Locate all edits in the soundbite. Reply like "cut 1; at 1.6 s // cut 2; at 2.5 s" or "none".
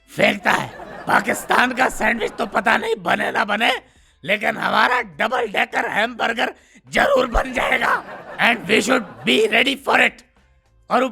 cut 1; at 0.9 s